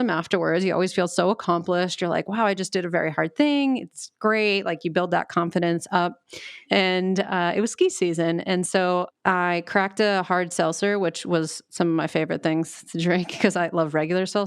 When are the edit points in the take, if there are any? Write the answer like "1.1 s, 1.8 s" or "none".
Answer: 6.6 s, 9.1 s